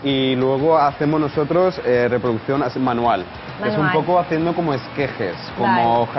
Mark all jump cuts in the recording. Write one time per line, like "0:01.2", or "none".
none